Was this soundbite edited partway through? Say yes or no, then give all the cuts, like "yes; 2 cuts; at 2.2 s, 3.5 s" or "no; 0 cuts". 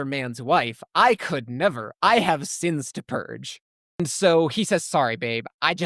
yes; 1 cut; at 4.0 s